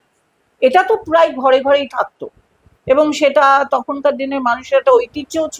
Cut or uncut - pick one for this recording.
uncut